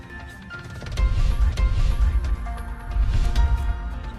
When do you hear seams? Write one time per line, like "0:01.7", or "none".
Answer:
0:01.0